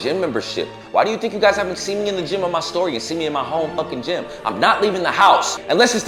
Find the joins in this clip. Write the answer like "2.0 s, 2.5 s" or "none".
none